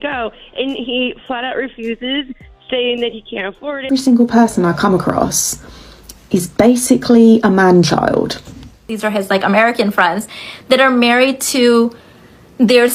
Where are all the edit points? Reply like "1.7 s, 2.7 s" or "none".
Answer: 3.9 s, 8.9 s